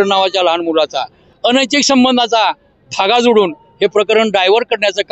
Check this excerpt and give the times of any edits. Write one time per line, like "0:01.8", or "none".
0:01.2